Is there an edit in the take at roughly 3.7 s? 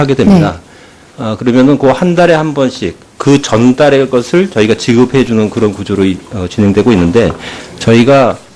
yes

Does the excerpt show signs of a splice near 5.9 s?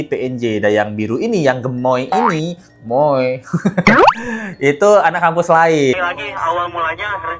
yes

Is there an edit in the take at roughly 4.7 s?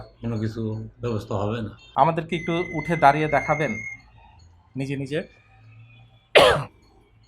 no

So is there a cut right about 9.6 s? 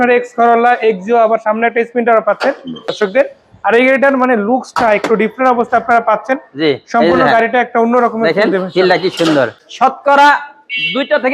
yes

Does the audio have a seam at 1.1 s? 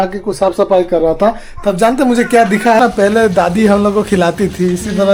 no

